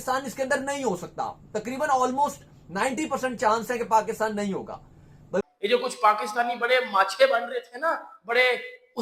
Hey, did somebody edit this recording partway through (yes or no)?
yes